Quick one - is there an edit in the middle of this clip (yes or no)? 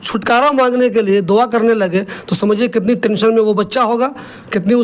no